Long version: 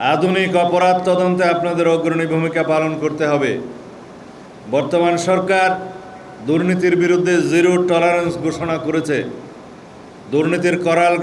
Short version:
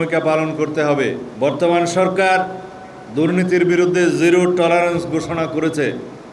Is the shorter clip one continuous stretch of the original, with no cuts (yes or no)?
no